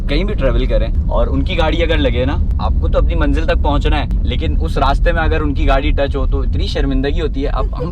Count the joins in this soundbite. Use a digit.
3